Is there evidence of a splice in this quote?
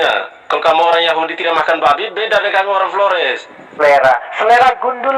yes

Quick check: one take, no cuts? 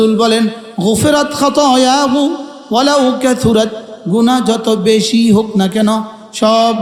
yes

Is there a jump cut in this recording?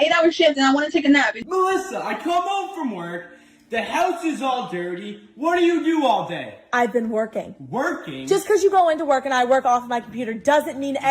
yes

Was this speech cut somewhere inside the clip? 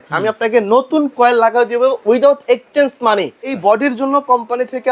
yes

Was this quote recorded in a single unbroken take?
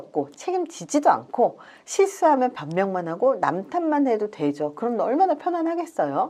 yes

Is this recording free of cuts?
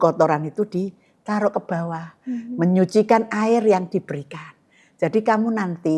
yes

